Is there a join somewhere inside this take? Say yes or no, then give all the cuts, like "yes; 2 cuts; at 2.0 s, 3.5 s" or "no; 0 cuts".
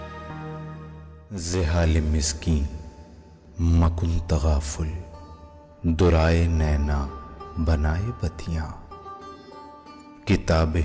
yes; 1 cut; at 1.4 s